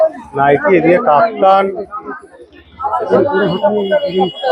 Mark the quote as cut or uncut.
cut